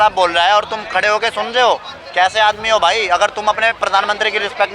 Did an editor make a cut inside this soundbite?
no; 0 cuts

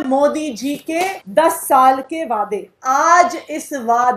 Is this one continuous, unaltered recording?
no; 2 cuts; at 1.2 s, 2.7 s

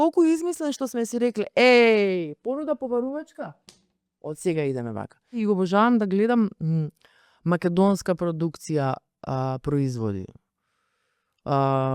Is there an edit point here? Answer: yes; 1 cut; at 5.4 s

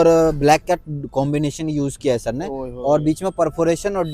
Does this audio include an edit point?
no; 0 cuts

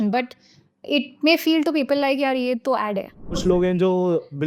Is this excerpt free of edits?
no; 1 cut; at 3.4 s

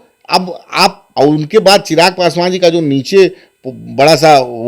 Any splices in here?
yes; 1 cut; at 1.0 s

